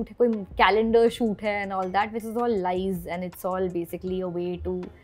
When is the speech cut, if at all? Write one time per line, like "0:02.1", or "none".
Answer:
none